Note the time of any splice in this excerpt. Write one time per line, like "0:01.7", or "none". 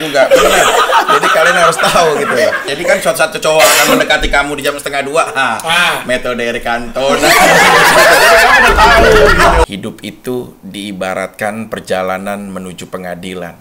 0:02.7
0:09.6

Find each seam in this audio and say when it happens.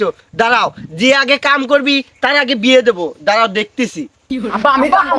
none

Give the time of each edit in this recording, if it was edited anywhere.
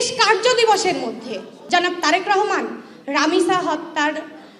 0:01.5

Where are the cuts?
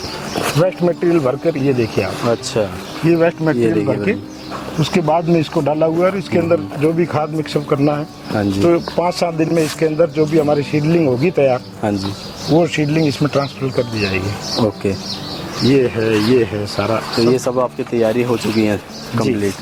none

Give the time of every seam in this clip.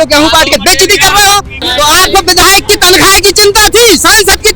0:01.6

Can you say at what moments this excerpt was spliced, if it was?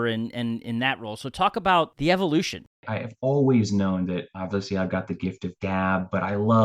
0:01.9
0:02.8

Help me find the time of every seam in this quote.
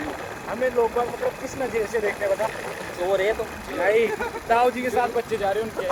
none

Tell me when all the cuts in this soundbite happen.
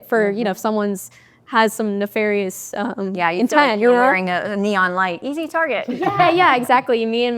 none

